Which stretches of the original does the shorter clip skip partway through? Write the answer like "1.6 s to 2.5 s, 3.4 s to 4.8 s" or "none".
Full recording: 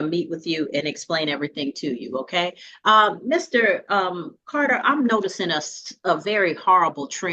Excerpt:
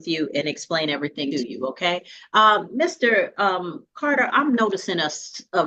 1.7 s to 1.8 s